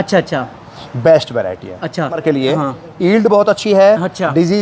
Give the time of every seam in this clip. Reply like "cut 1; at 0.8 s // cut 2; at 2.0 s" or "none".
cut 1; at 2.2 s